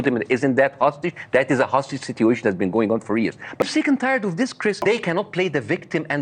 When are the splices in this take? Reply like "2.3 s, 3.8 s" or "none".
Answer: 3.6 s, 4.8 s